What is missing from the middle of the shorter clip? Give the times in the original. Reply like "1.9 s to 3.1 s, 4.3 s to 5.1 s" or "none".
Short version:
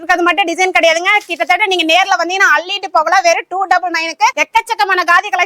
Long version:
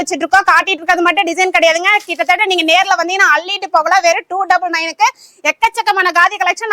5.2 s to 5.5 s